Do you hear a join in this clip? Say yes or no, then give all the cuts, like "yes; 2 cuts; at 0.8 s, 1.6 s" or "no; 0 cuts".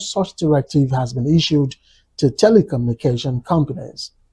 no; 0 cuts